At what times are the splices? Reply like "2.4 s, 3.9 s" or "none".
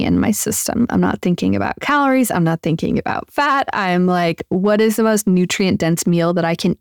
none